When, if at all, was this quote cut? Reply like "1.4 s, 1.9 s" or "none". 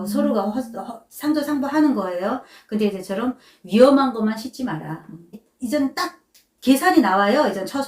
5.4 s